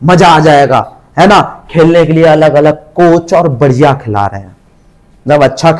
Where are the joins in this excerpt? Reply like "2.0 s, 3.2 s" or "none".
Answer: none